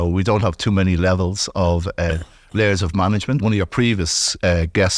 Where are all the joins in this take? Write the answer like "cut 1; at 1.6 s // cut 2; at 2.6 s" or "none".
cut 1; at 3.4 s